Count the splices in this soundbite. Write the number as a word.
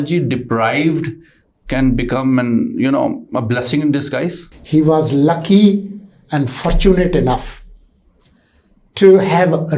one